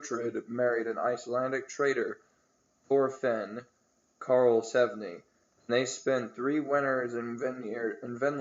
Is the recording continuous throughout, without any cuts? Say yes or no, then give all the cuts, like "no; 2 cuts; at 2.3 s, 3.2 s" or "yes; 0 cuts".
yes; 0 cuts